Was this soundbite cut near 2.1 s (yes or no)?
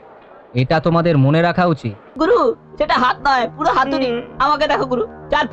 yes